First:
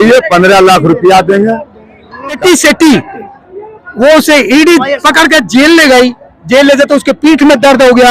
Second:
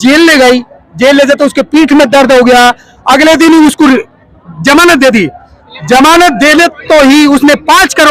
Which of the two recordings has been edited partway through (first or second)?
first